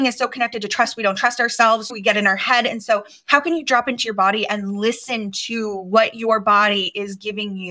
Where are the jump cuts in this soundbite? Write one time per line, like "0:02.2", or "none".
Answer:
0:01.9